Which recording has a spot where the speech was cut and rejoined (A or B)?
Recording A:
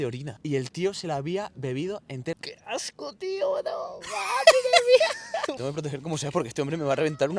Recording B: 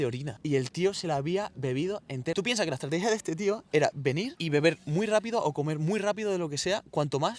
A